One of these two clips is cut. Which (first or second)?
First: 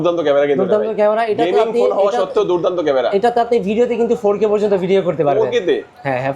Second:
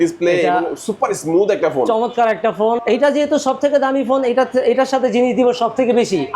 second